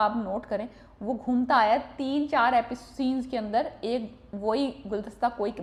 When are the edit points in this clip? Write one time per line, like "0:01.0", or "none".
none

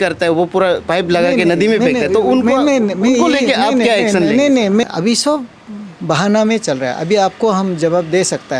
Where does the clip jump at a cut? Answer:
0:04.8

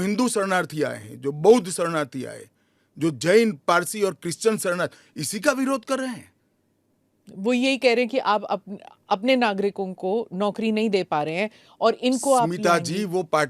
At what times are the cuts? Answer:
none

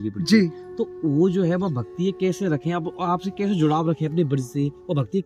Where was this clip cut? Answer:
none

